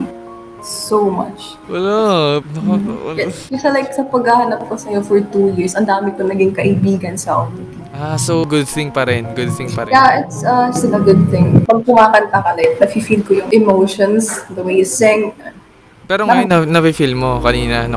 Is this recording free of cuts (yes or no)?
no